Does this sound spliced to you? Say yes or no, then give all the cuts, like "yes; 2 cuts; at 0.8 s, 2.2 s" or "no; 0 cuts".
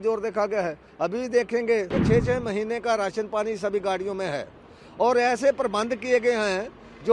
yes; 1 cut; at 2.0 s